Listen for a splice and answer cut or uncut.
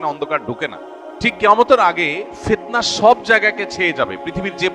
cut